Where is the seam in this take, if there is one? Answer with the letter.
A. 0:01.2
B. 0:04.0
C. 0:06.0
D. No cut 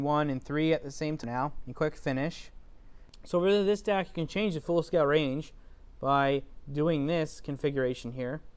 A